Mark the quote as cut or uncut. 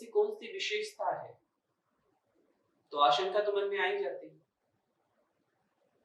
uncut